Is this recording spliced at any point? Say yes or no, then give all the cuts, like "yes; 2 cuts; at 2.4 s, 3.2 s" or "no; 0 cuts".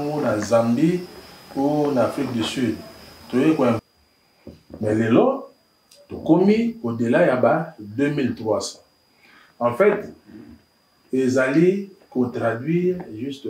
yes; 1 cut; at 3.8 s